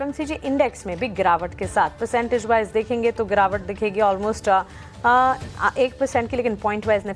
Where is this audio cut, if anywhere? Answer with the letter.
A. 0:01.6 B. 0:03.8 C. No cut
A